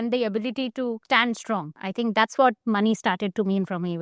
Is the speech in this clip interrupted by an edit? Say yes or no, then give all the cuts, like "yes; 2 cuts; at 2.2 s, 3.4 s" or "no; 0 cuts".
yes; 1 cut; at 1.4 s